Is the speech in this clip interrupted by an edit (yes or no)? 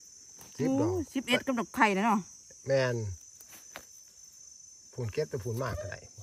no